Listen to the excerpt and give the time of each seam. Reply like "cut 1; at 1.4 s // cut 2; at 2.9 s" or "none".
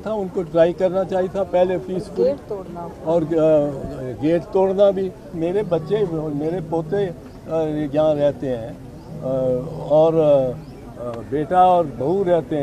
cut 1; at 5.3 s